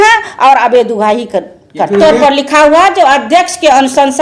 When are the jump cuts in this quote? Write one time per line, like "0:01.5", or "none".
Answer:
0:02.0